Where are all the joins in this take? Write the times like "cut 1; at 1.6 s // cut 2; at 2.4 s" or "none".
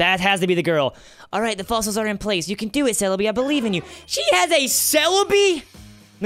none